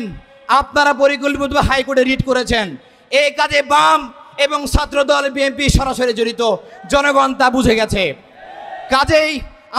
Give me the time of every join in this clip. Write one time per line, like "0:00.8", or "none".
none